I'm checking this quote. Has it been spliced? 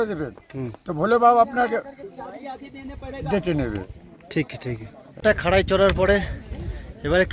no; 0 cuts

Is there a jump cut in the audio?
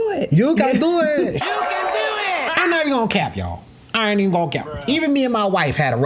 yes; 1 cut; at 2.5 s

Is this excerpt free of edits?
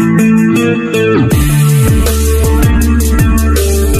yes; 0 cuts

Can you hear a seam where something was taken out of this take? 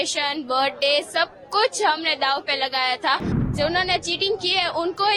yes; 1 cut; at 3.5 s

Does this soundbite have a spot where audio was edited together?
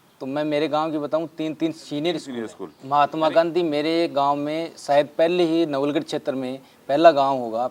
yes; 1 cut; at 2.6 s

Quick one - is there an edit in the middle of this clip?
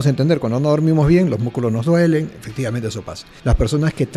yes; 1 cut; at 3.3 s

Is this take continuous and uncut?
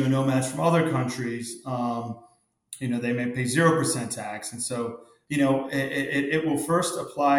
no; 1 cut; at 5.1 s

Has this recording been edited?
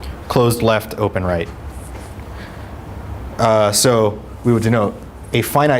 yes; 1 cut; at 4.3 s

